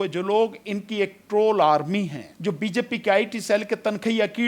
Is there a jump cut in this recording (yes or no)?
yes